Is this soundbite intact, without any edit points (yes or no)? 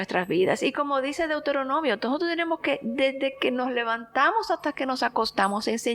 yes